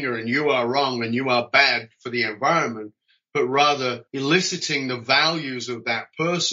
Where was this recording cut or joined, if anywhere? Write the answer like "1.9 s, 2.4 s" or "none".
4.1 s